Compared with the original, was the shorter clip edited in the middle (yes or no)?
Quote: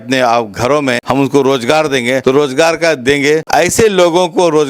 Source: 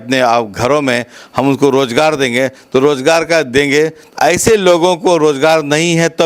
yes